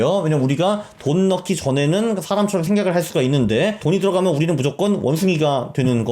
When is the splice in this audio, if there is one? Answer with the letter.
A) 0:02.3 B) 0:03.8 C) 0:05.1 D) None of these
B